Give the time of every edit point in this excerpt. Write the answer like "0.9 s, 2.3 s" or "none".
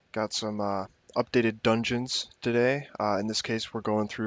none

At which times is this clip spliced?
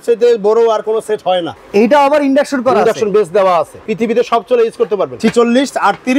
1.5 s, 3.8 s, 5.1 s

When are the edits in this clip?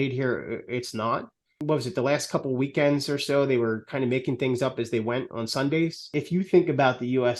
1.6 s, 6.1 s

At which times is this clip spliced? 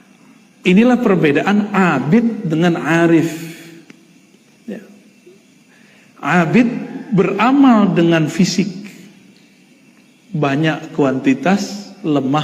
0.9 s

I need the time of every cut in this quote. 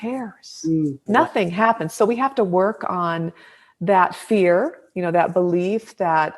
1.0 s

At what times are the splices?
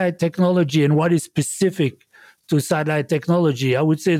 none

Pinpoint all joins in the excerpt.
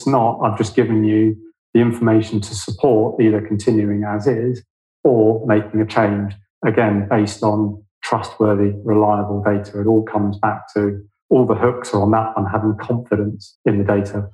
13.4 s

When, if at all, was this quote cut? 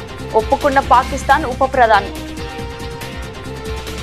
2.0 s

